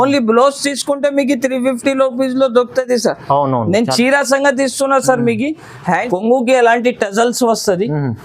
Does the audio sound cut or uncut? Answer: cut